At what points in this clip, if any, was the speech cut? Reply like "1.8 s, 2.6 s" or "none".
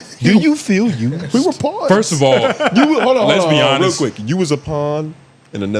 none